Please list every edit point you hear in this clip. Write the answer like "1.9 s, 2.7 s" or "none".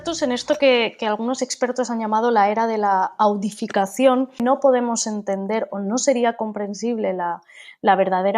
4.4 s

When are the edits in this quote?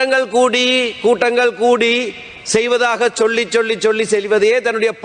none

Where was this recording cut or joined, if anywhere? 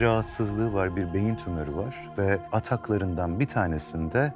2.5 s

